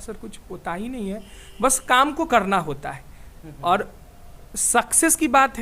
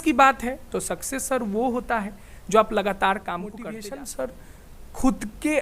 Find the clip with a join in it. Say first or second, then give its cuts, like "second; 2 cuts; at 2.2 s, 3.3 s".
second; 1 cut; at 3.7 s